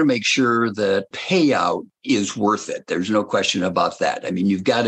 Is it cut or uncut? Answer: cut